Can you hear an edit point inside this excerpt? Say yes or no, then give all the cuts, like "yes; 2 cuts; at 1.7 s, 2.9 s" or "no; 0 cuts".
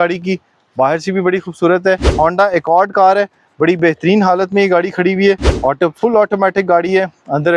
yes; 2 cuts; at 2.1 s, 5.5 s